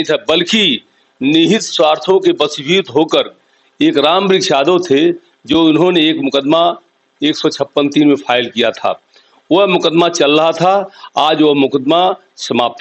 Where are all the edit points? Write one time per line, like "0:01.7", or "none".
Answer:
none